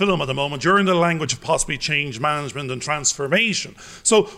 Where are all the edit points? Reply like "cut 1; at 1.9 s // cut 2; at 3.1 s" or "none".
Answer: none